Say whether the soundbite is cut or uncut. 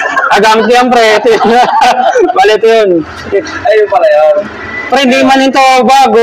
cut